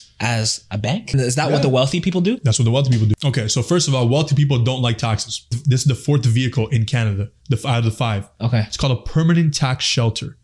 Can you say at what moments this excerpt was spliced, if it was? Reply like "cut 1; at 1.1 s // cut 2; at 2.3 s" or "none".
cut 1; at 1.1 s // cut 2; at 3.2 s // cut 3; at 5.5 s

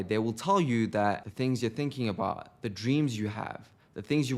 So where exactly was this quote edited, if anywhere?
cut 1; at 1.3 s

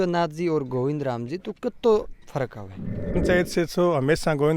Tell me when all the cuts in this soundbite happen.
cut 1; at 3.2 s

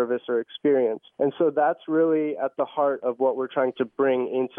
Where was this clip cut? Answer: cut 1; at 1.0 s

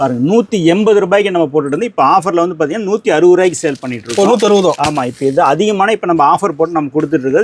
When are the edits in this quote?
none

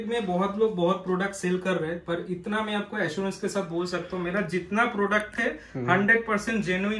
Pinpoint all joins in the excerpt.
none

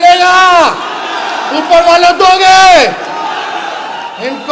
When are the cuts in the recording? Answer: none

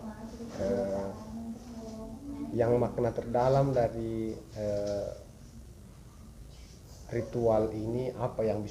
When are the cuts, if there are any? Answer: none

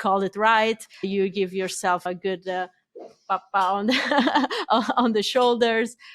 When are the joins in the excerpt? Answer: cut 1; at 1.1 s // cut 2; at 2.1 s

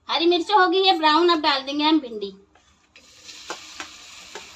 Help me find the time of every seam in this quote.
none

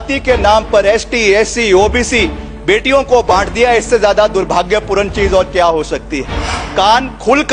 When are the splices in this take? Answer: cut 1; at 6.5 s

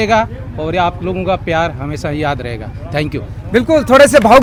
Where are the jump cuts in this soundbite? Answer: none

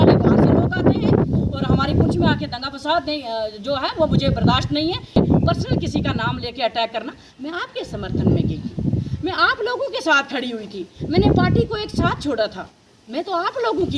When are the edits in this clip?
cut 1; at 5.2 s

